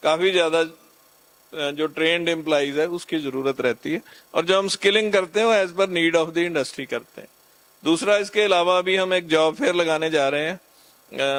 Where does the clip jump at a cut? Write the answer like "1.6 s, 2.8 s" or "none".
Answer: none